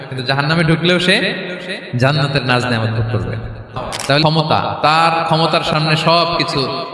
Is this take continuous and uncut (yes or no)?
no